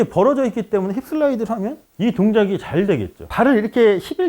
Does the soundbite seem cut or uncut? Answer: cut